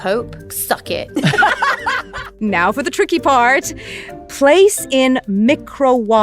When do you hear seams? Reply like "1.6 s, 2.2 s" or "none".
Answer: 2.3 s